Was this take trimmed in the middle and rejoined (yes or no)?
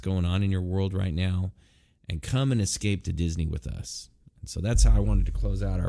no